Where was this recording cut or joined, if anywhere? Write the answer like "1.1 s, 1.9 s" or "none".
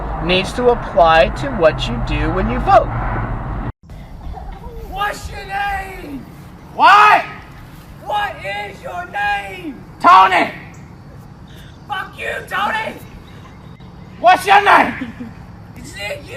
3.7 s